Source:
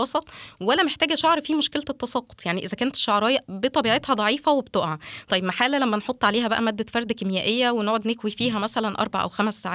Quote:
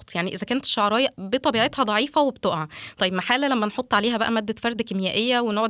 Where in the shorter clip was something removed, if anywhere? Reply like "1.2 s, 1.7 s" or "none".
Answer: none